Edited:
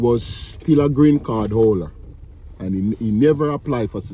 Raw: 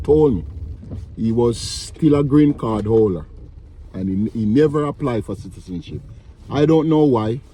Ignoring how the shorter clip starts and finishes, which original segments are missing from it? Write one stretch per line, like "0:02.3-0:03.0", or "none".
none